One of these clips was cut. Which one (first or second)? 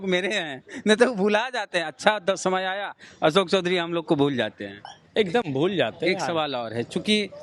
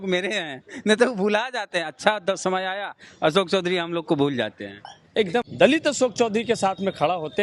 second